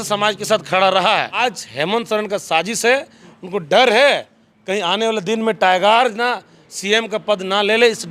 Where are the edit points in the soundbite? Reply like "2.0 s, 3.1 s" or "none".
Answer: 1.4 s